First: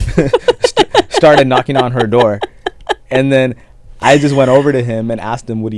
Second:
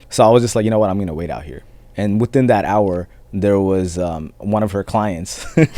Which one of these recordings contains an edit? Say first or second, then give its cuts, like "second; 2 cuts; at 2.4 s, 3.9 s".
second; 2 cuts; at 1.8 s, 4.4 s